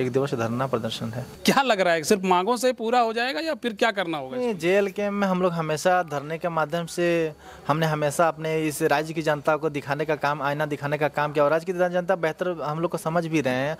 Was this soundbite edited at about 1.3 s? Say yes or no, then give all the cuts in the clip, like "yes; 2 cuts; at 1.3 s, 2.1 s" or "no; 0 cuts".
yes; 1 cut; at 1.3 s